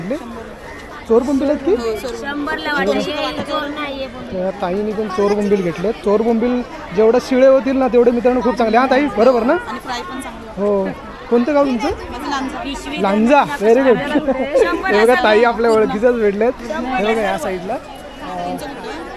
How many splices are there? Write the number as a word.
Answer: zero